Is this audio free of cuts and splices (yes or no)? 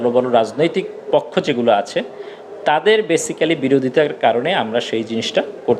yes